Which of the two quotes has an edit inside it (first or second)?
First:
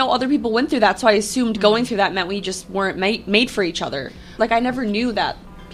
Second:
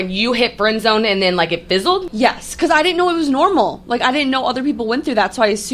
second